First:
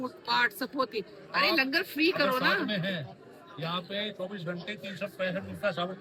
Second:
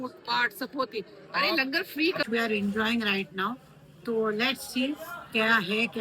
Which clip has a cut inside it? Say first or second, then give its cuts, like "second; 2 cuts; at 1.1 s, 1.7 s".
second; 1 cut; at 2.2 s